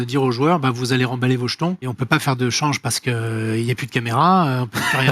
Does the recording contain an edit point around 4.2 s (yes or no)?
no